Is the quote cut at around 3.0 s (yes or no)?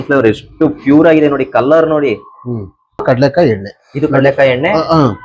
yes